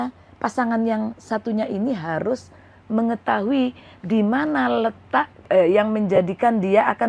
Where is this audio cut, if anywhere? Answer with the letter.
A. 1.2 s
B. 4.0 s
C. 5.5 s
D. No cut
C